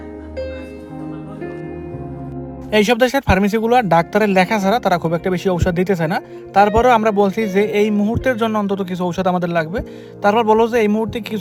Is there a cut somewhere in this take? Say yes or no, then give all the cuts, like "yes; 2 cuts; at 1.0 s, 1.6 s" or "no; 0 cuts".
no; 0 cuts